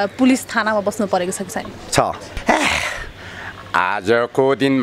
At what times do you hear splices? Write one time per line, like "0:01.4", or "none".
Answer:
0:02.3

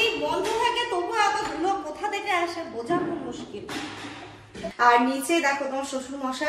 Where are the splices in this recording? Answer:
0:04.6

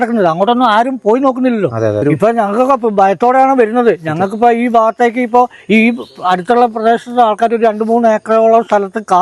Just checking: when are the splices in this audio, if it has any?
0:02.0

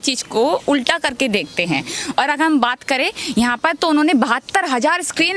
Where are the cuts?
none

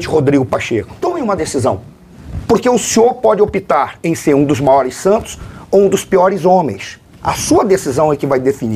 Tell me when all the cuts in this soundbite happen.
0:00.9

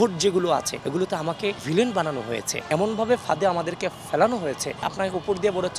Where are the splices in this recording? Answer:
0:01.1
0:02.7
0:04.8

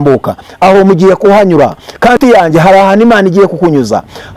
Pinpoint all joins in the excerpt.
0:02.2

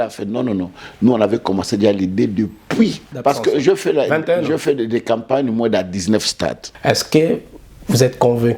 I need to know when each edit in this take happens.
0:03.1
0:06.7

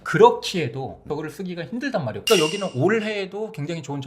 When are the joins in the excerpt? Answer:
0:01.1
0:02.2

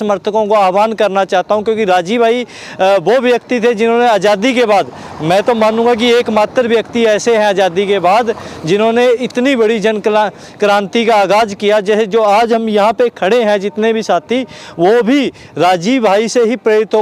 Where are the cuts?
none

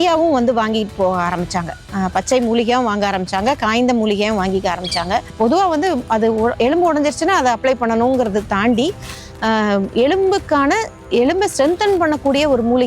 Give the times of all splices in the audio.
0:05.3

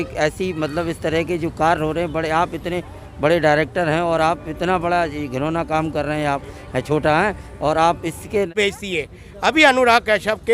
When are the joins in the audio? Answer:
0:08.5

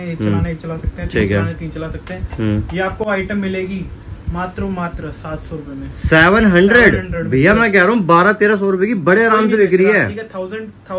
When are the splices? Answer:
none

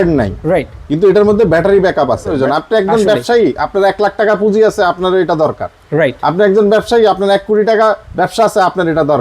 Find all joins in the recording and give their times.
0:02.4

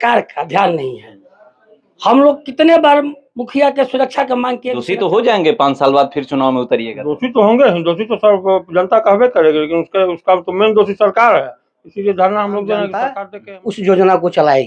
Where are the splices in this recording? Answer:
0:04.7
0:13.1

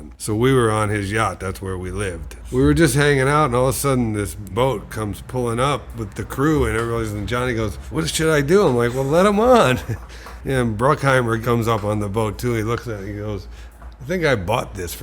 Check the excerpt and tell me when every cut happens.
0:04.5
0:11.4

